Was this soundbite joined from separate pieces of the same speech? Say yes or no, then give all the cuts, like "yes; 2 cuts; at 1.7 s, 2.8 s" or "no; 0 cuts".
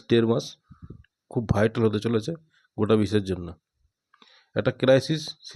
no; 0 cuts